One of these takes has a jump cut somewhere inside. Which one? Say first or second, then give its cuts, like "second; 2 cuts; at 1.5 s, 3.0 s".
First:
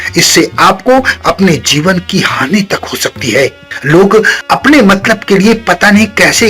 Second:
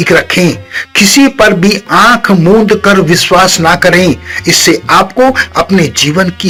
first; 2 cuts; at 3.7 s, 4.4 s